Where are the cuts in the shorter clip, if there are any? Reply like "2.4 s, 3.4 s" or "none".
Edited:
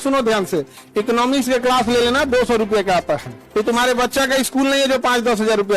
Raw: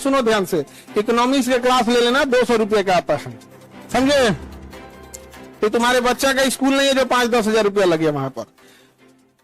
3.3 s

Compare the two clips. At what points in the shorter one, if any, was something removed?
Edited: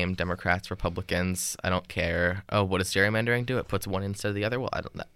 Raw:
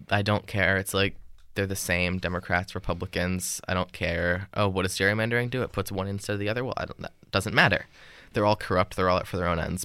none

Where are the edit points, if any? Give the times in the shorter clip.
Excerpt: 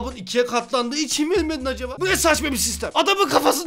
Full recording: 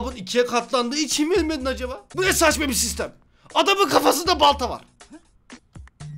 1.9 s, 2.8 s

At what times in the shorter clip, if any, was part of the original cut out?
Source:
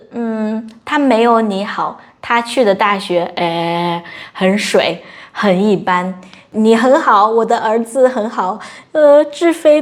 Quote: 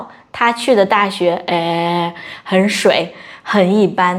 none

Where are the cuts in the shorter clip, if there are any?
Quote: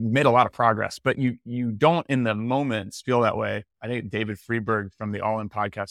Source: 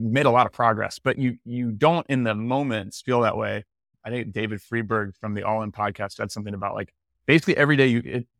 3.7 s

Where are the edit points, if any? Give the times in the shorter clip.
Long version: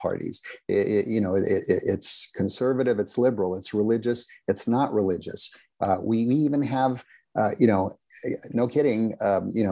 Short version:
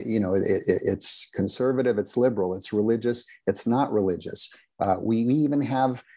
none

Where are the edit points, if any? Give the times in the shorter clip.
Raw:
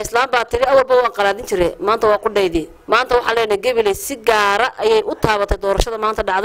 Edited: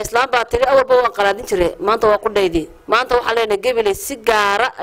none

